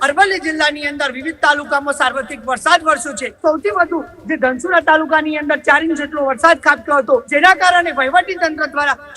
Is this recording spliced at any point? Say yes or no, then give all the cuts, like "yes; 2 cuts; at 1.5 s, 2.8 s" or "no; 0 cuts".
yes; 2 cuts; at 3.3 s, 7.3 s